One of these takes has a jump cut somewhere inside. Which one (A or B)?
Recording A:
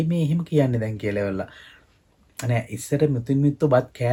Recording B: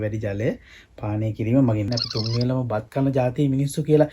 B